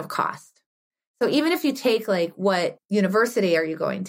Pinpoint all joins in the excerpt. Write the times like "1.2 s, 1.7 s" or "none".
2.8 s